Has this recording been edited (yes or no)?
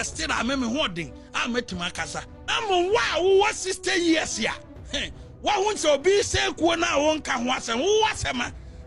yes